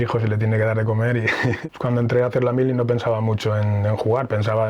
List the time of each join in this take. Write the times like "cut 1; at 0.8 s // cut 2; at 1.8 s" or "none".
cut 1; at 1.6 s